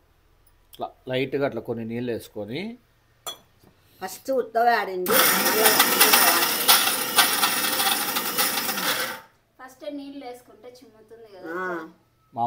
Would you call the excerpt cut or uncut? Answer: uncut